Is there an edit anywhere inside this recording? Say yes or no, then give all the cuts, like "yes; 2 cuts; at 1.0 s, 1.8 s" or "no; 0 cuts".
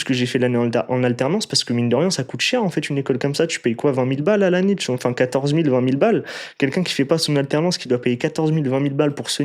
no; 0 cuts